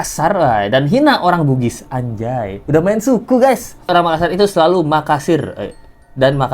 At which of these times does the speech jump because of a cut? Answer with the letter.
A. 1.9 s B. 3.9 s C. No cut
B